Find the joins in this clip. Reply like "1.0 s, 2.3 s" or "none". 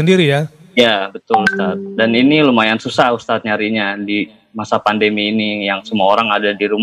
none